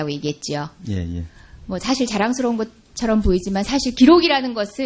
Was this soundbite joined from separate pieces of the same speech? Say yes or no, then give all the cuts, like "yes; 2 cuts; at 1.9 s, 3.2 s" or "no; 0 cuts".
no; 0 cuts